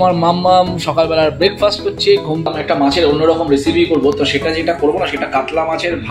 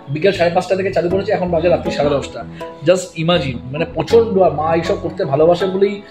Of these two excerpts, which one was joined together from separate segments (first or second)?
first